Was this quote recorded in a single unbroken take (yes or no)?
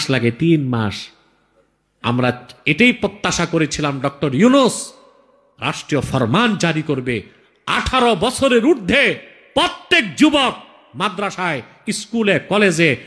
yes